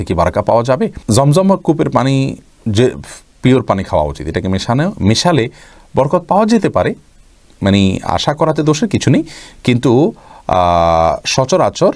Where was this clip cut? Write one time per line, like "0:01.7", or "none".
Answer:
none